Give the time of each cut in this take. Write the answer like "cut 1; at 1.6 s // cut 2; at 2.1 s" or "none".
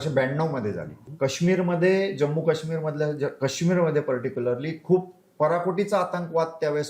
cut 1; at 1.0 s

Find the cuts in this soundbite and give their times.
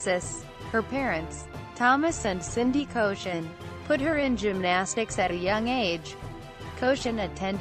cut 1; at 2.9 s

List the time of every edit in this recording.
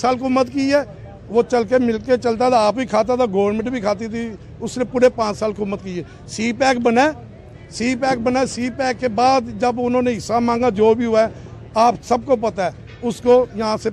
none

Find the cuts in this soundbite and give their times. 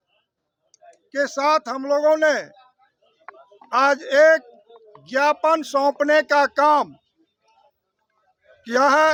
none

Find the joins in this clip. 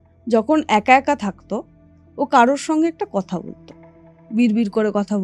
none

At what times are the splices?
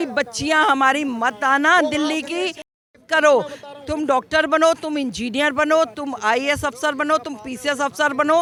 none

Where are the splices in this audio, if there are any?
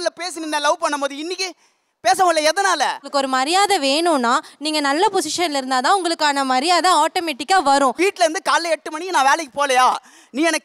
cut 1; at 3.0 s

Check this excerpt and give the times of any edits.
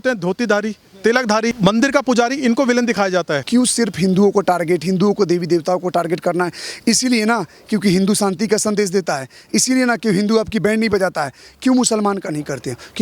cut 1; at 1.6 s // cut 2; at 3.4 s

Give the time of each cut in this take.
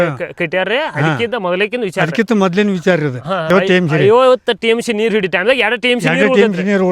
cut 1; at 3.5 s

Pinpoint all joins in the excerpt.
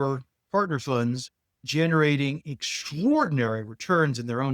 cut 1; at 1.7 s

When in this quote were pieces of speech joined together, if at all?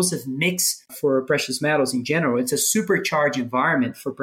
cut 1; at 0.9 s

